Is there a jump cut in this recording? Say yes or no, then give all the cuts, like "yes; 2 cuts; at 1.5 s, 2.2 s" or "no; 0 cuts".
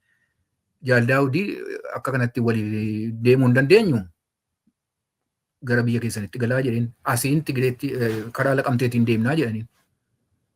no; 0 cuts